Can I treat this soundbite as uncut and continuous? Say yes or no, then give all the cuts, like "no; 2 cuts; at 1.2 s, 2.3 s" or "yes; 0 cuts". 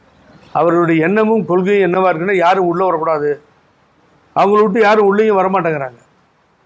yes; 0 cuts